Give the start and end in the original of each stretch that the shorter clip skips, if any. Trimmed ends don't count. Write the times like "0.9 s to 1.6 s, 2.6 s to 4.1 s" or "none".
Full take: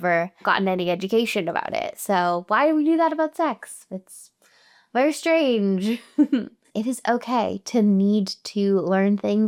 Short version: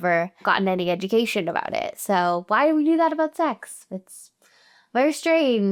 none